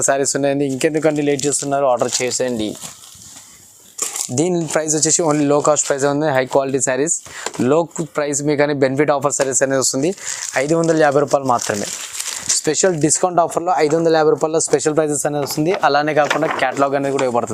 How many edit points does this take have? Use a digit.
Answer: 0